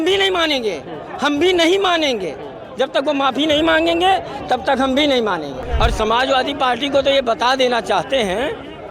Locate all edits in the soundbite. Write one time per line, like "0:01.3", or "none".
0:05.6